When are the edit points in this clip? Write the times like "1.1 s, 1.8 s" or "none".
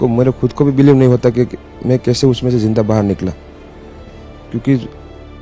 none